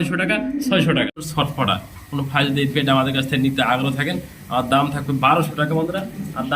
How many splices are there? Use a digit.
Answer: 1